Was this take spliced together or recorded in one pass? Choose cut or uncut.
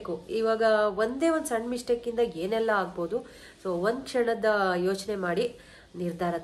uncut